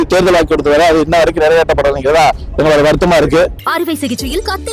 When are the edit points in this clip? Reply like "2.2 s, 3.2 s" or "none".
3.7 s

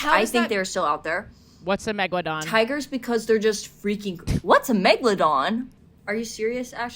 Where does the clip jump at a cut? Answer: 2.4 s, 5.8 s

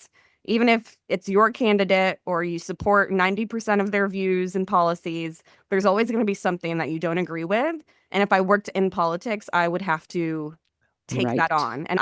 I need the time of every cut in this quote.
none

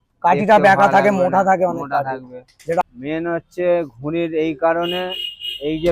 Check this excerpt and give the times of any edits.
2.8 s

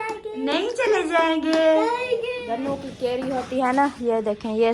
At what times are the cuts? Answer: 2.4 s

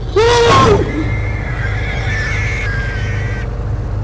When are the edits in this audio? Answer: none

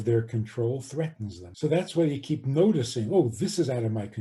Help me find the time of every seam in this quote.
1.4 s

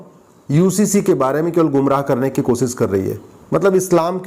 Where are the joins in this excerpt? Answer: 3.3 s

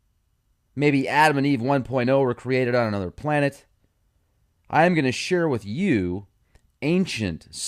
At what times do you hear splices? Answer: 1.4 s

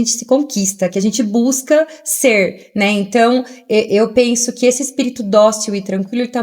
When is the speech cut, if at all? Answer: none

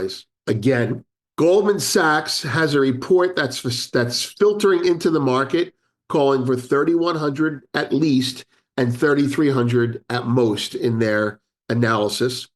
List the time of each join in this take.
1.2 s

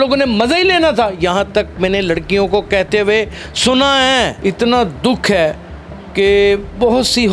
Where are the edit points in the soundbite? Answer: 4.3 s

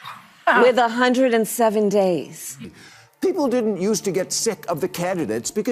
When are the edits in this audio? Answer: 2.7 s

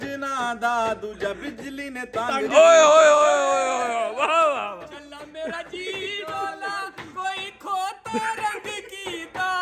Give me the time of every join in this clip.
none

